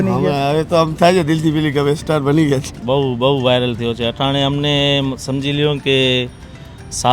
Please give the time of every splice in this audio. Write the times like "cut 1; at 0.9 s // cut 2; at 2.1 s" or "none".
cut 1; at 2.8 s